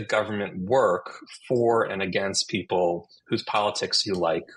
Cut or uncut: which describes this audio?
uncut